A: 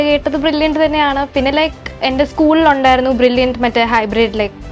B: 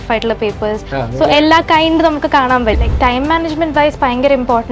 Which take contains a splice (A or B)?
B